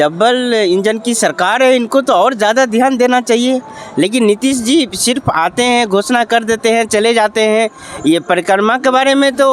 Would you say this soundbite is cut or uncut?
uncut